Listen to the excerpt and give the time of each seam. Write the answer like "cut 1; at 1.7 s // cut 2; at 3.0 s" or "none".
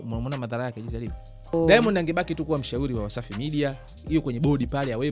cut 1; at 1.5 s